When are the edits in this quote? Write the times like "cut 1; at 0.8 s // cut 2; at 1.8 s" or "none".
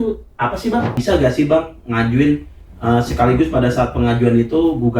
cut 1; at 1.0 s